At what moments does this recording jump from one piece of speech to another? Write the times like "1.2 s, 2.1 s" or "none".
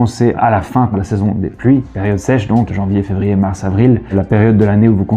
0.9 s, 2.7 s, 4.1 s

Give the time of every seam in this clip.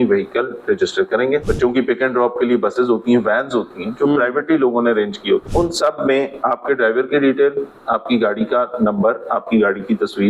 1.4 s, 5.5 s

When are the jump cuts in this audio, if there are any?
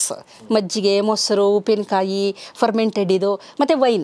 none

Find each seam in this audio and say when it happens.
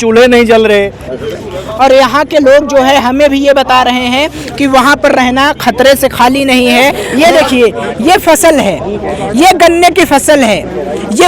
7.0 s

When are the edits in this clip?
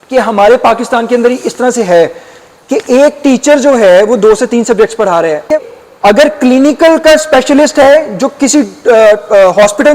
5.5 s

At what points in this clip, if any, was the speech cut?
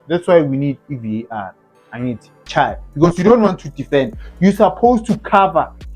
2.3 s

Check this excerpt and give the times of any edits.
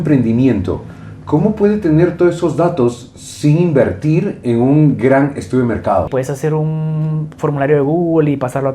6.1 s

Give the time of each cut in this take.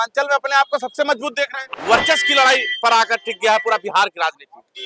1.6 s

